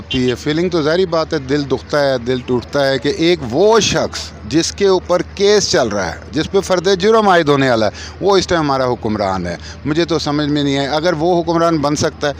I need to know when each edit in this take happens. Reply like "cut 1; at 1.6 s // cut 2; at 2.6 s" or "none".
none